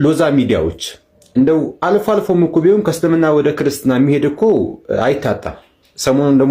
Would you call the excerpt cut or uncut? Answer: uncut